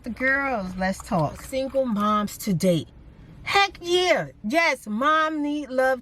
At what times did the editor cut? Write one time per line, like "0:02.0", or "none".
0:01.5